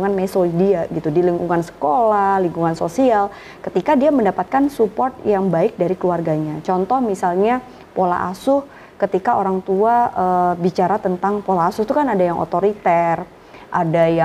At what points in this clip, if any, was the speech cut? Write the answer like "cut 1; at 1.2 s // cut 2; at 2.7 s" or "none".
none